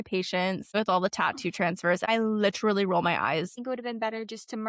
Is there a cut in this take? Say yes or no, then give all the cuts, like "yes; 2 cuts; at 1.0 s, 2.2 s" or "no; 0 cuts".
yes; 3 cuts; at 0.7 s, 2.0 s, 3.6 s